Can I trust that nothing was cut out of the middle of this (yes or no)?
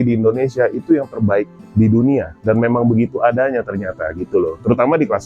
yes